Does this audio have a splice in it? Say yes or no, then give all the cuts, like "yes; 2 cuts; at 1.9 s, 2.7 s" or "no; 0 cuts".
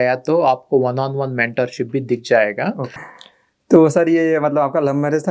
yes; 1 cut; at 2.9 s